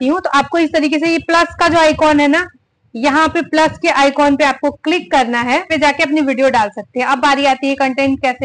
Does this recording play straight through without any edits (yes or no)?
no